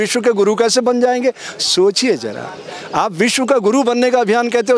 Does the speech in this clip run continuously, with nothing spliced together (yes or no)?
yes